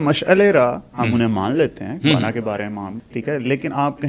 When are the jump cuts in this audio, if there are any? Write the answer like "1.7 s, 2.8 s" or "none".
2.9 s